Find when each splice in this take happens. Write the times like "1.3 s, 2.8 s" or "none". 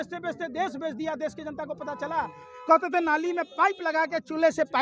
2.4 s

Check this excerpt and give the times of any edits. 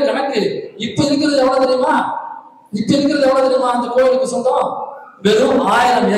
none

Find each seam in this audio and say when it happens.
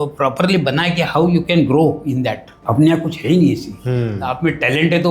2.5 s

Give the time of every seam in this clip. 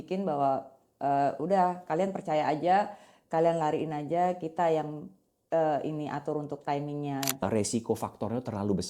7.4 s

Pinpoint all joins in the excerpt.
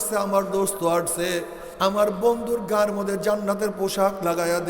1.6 s

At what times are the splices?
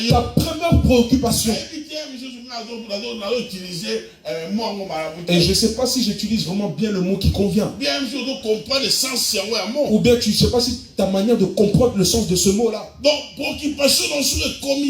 none

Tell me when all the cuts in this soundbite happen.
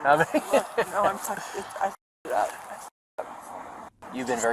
none

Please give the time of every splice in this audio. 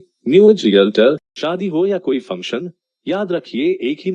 1.3 s

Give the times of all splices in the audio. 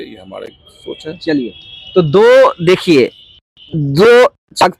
none

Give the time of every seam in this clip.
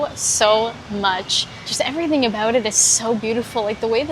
1.7 s

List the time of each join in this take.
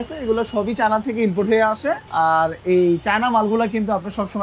2.0 s

